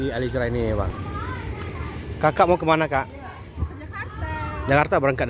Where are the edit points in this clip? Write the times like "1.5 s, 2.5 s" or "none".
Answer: 0.9 s